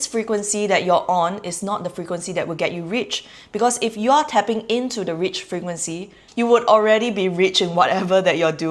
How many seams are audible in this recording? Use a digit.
0